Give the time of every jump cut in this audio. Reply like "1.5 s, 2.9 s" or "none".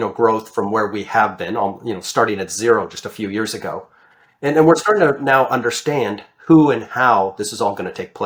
none